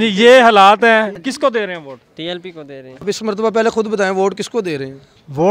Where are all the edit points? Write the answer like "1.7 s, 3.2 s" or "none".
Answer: 1.1 s, 3.0 s